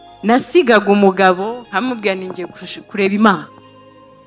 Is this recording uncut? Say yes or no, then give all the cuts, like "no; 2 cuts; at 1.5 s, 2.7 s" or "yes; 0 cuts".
yes; 0 cuts